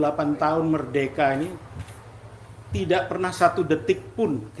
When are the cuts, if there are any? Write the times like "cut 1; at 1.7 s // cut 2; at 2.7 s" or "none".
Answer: none

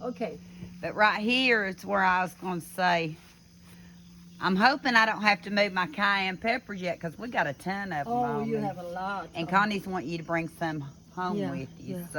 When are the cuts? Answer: none

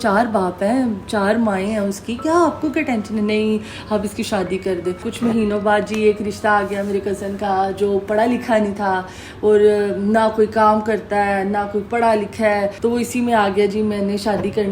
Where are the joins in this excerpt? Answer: cut 1; at 5.1 s // cut 2; at 12.7 s

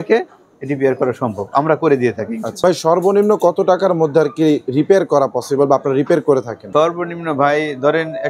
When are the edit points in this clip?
cut 1; at 2.5 s

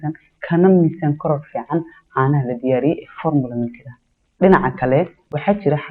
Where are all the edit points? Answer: none

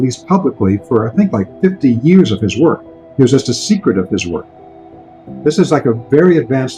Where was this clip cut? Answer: cut 1; at 4.8 s

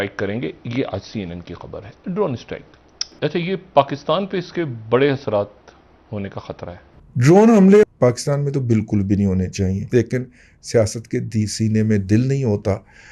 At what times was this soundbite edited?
cut 1; at 3.1 s // cut 2; at 6.9 s // cut 3; at 7.9 s // cut 4; at 9.8 s

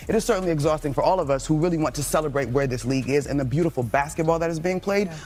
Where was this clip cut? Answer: none

